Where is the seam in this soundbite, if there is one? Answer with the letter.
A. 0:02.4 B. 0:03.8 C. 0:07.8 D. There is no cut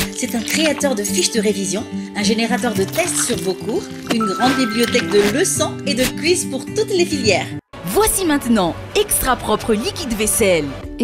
C